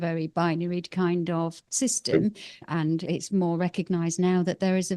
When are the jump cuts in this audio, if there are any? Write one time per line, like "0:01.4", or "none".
0:02.7